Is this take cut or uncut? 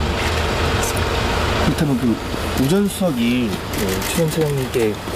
uncut